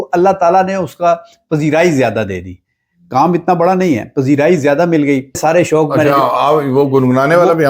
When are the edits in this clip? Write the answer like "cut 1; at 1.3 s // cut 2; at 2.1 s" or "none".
cut 1; at 5.4 s